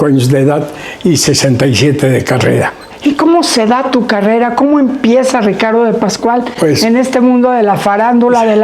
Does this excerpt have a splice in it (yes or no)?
no